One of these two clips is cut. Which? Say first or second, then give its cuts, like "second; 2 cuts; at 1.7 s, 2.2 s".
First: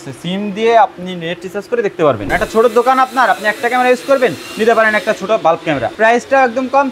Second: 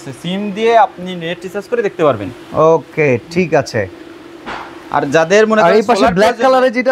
first; 2 cuts; at 2.3 s, 5.9 s